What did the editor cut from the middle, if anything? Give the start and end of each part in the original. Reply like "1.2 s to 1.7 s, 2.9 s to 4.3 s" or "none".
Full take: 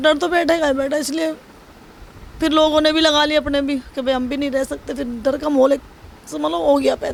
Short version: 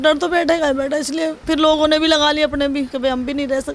1.4 s to 2.3 s, 3.9 s to 4.0 s